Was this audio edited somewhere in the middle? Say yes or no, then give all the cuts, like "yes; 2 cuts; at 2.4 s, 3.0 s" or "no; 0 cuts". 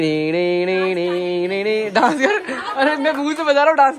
no; 0 cuts